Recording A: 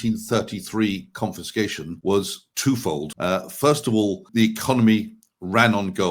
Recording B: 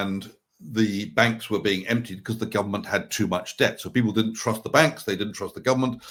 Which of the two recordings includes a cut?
A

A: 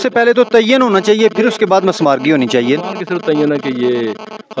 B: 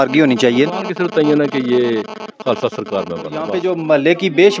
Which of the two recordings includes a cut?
B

